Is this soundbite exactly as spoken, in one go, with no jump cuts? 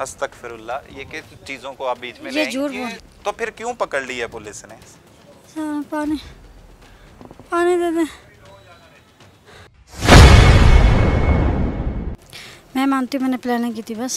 no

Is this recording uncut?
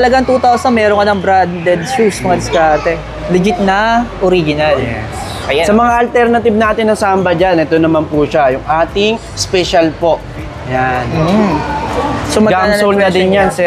yes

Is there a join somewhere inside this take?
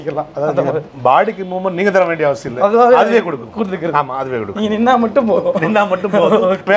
no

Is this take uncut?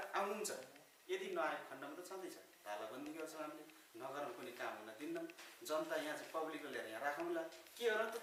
yes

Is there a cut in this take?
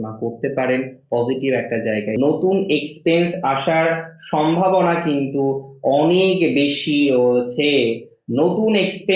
yes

